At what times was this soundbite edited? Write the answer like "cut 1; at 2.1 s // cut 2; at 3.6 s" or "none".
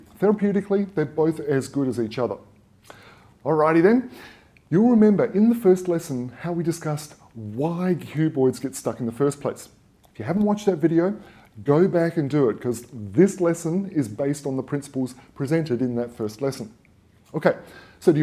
cut 1; at 3.4 s